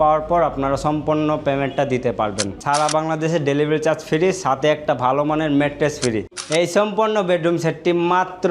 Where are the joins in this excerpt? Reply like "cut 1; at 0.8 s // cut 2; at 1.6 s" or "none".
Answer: cut 1; at 2.5 s // cut 2; at 6.3 s

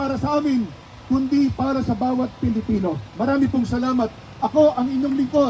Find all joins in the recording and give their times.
none

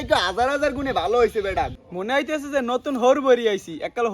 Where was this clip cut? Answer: cut 1; at 1.7 s

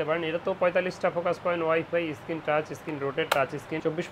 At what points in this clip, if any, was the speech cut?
none

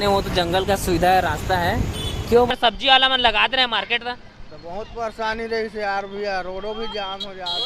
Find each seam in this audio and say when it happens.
cut 1; at 2.5 s

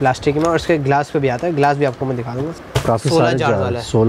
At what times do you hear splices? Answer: cut 1; at 2.6 s

